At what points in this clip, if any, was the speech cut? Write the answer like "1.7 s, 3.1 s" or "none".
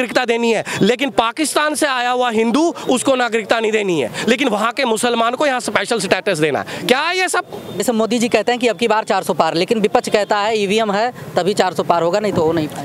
7.7 s